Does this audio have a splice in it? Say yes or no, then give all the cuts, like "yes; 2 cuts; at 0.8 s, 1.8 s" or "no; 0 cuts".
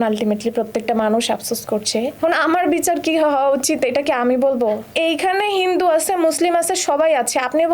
yes; 2 cuts; at 2.1 s, 4.9 s